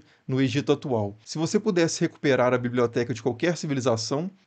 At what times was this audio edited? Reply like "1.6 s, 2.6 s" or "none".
1.3 s